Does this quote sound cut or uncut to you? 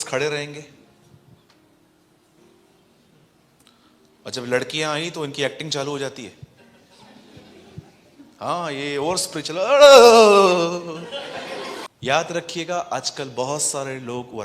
cut